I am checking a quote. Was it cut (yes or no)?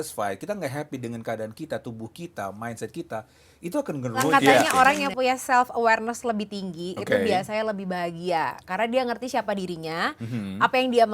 yes